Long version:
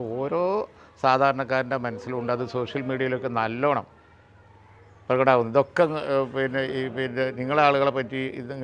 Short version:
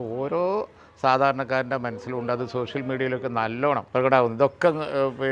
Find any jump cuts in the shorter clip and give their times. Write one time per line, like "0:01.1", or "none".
0:03.9